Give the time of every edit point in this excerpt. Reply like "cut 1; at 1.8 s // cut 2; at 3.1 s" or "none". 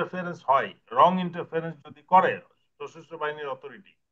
none